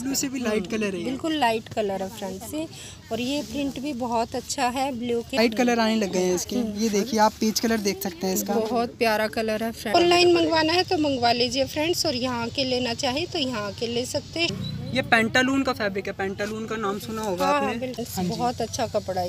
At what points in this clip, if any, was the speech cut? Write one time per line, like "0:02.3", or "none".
0:05.4
0:09.9
0:14.5
0:18.0